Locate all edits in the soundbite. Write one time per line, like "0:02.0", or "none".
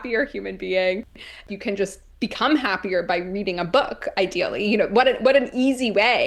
0:01.5